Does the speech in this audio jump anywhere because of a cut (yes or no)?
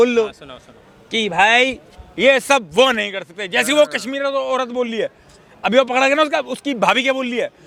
no